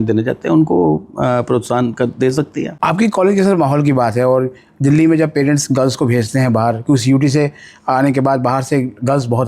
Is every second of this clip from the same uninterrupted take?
no; 1 cut; at 2.7 s

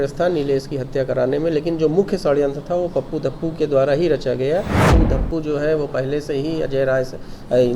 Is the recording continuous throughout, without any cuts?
no; 1 cut; at 4.9 s

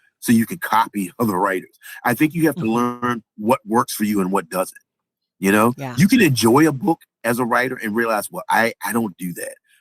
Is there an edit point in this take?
no; 0 cuts

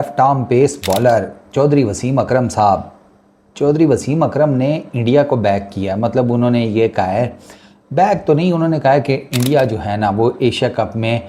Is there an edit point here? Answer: no; 0 cuts

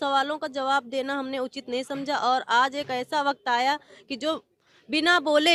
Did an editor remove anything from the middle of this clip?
no; 0 cuts

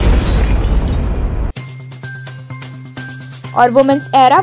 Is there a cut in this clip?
no; 0 cuts

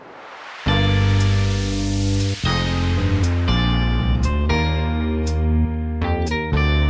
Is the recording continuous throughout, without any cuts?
yes; 0 cuts

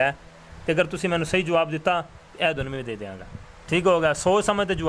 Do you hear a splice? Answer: no; 0 cuts

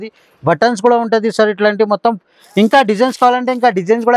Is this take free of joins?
yes; 0 cuts

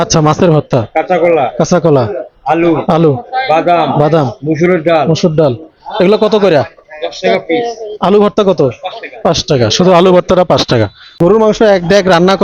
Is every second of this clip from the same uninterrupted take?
no; 1 cut; at 11.0 s

